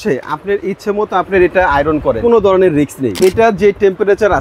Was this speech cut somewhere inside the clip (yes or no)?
yes